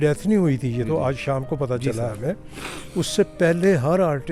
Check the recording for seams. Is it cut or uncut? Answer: uncut